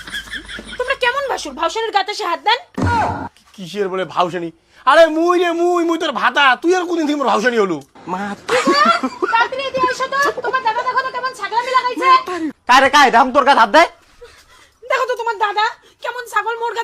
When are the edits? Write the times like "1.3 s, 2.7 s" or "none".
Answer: 12.5 s

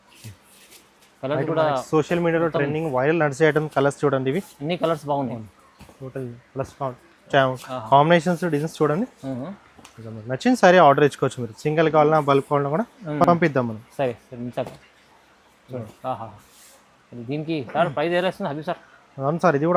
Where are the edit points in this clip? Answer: none

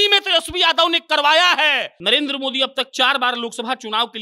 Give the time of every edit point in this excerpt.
1.9 s

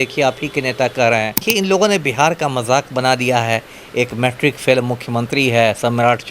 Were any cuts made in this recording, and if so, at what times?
1.4 s

